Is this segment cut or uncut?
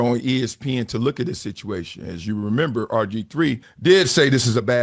cut